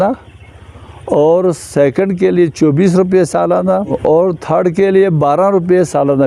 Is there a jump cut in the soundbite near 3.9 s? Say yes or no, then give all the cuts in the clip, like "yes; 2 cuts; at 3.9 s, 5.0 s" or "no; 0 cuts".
yes; 1 cut; at 3.9 s